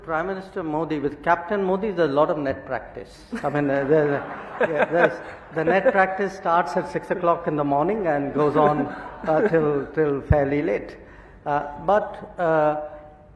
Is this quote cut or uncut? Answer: uncut